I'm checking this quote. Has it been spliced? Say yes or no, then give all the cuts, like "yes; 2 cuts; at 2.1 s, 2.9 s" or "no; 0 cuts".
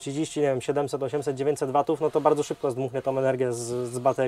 no; 0 cuts